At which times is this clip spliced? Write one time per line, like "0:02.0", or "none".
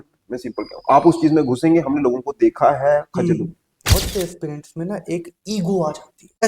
0:03.7

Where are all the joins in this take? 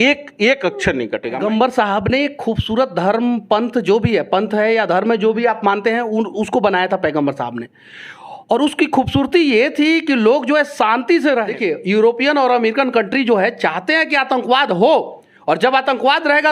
0:01.3
0:11.5

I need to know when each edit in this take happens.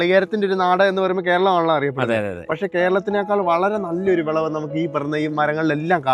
none

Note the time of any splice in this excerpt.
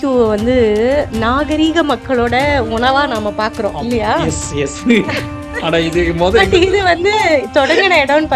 0:01.1

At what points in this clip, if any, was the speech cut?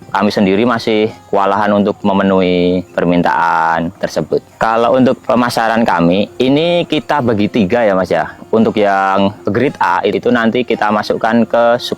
0:10.1

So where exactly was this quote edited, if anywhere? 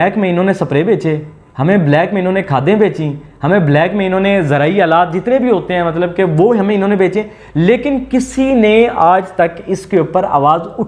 none

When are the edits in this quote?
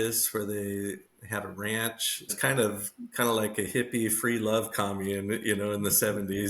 0:02.3

